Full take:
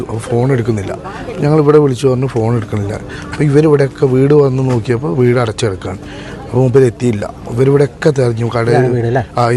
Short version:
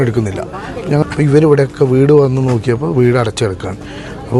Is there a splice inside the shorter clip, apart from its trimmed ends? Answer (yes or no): yes